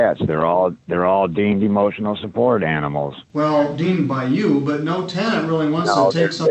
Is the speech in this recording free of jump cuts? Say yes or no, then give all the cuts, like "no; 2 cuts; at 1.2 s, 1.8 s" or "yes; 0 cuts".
no; 1 cut; at 3.2 s